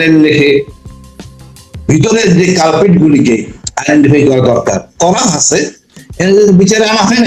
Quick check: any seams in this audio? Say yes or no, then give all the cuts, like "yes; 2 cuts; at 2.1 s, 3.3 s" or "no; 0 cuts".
no; 0 cuts